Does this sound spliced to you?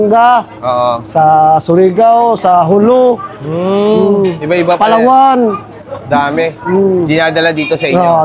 no; 0 cuts

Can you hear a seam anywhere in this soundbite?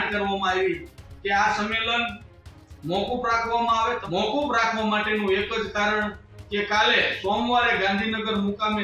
yes; 1 cut; at 4.0 s

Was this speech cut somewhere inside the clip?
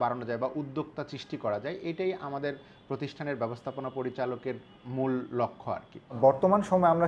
yes; 1 cut; at 6.1 s

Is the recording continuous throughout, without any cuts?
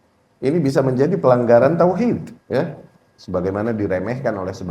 no; 1 cut; at 2.3 s

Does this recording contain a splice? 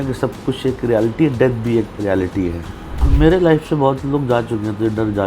yes; 1 cut; at 3.1 s

